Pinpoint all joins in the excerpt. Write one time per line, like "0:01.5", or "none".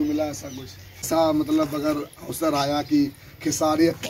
0:01.1